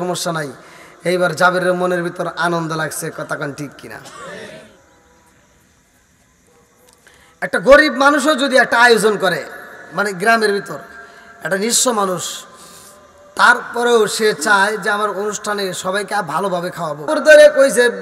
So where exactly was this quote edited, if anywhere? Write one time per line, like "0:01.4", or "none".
0:17.1